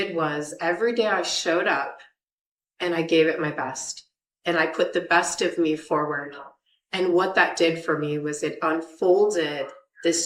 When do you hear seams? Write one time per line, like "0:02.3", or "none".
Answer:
none